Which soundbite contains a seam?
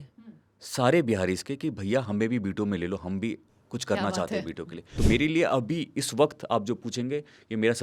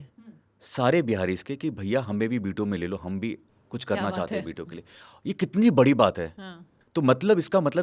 first; 1 cut; at 4.9 s

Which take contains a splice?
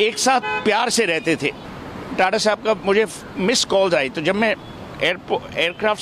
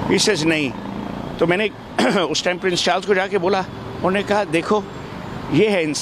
first; 1 cut; at 1.6 s

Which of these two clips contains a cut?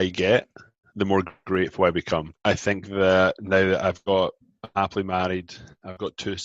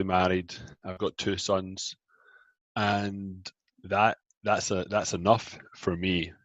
first; 1 cut; at 2.3 s

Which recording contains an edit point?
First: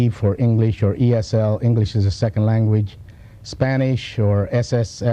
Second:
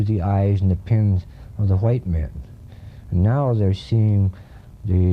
second; 1 cut; at 2.3 s

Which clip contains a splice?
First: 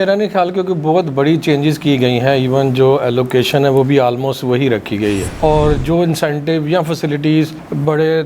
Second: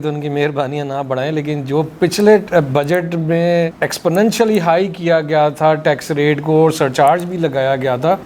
first; 1 cut; at 5.3 s

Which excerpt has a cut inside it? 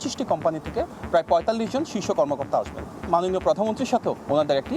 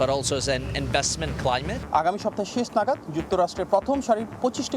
second; 1 cut; at 1.8 s

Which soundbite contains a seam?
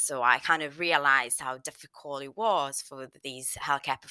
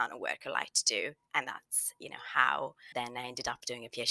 second; 1 cut; at 2.9 s

